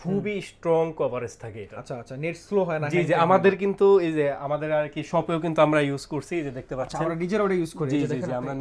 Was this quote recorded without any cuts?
yes; 0 cuts

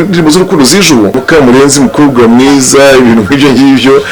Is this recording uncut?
no; 1 cut; at 1.2 s

